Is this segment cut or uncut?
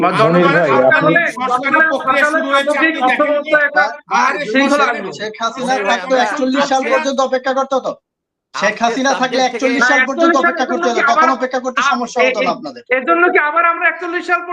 uncut